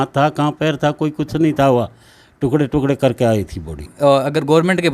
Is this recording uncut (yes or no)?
no